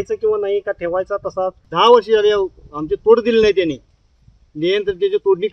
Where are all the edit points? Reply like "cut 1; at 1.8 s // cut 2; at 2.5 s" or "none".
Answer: cut 1; at 1.6 s

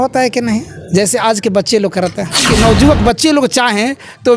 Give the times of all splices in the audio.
cut 1; at 2.4 s

